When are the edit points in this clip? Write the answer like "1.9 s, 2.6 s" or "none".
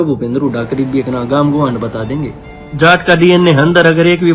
2.6 s